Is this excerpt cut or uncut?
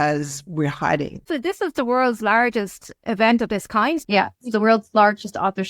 cut